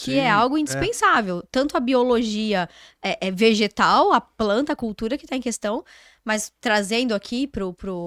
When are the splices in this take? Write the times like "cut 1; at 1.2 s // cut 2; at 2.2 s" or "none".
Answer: none